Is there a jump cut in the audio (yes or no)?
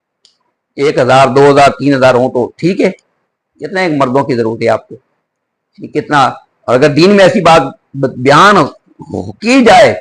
no